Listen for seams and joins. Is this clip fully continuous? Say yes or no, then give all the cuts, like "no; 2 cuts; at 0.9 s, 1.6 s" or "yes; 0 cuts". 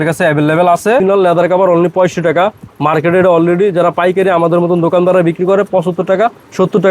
no; 1 cut; at 1.0 s